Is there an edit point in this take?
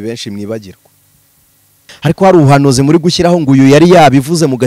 yes; 1 cut; at 1.8 s

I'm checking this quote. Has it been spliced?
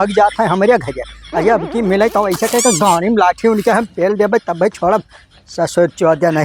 no; 0 cuts

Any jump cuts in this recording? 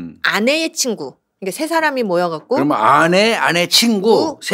no; 0 cuts

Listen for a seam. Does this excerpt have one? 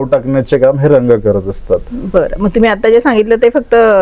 no; 0 cuts

